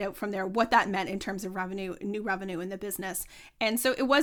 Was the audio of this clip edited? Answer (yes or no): no